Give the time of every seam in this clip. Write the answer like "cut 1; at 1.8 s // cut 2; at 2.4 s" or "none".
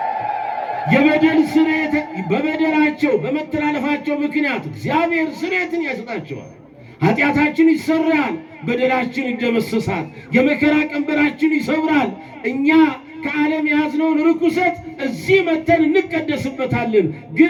none